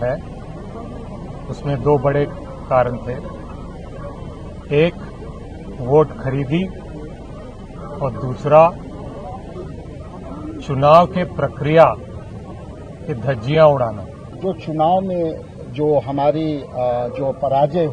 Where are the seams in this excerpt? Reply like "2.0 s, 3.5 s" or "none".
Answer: 14.3 s